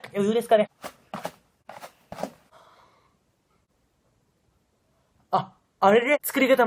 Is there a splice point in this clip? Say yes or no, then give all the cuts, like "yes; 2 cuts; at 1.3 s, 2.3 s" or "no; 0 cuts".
no; 0 cuts